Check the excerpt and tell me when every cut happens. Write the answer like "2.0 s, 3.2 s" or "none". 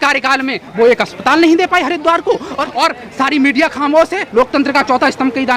2.5 s